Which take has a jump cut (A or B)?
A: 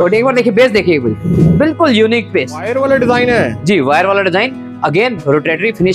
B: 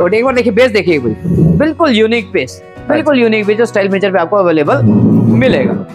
A